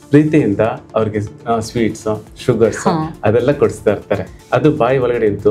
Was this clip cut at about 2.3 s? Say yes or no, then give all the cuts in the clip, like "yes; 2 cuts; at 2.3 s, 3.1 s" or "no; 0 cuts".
no; 1 cut; at 4.3 s